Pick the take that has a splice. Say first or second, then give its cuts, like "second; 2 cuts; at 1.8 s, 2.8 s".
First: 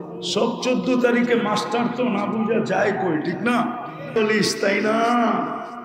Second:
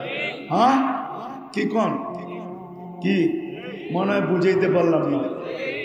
first; 1 cut; at 4.1 s